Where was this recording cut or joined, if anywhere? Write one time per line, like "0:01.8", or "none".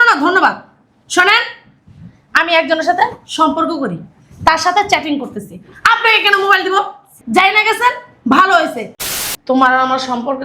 0:08.9